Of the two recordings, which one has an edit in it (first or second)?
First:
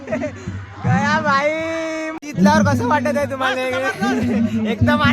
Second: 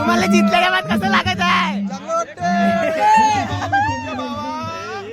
first